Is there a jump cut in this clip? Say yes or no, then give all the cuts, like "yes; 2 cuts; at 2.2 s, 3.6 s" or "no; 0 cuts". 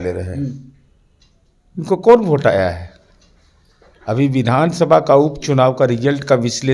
no; 0 cuts